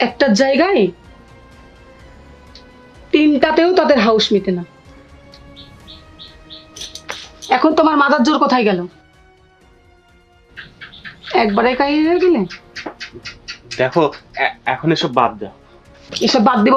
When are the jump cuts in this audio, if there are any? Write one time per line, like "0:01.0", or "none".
0:01.0
0:03.1